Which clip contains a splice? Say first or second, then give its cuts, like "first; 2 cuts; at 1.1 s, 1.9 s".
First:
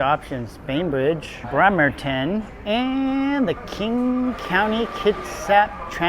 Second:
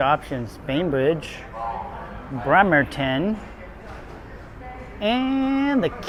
first; 2 cuts; at 1.3 s, 2.5 s